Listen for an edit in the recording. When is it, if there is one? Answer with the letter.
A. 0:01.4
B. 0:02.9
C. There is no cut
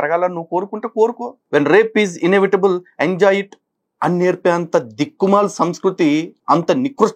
A